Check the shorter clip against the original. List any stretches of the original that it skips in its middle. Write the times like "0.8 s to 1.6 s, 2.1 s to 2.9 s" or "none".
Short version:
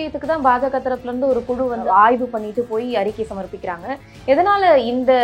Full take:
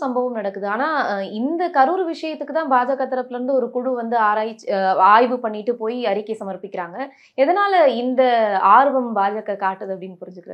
4.1 s to 4.9 s